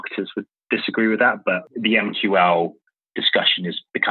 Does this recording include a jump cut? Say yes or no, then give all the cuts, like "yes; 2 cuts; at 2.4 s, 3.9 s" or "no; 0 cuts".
yes; 1 cut; at 1.6 s